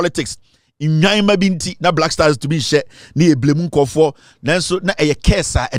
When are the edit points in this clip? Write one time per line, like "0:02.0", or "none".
none